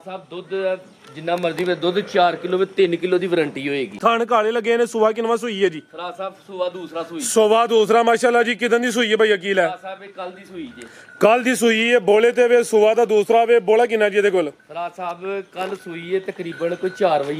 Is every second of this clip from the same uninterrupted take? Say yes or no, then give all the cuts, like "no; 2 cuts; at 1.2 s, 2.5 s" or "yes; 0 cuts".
no; 1 cut; at 4.0 s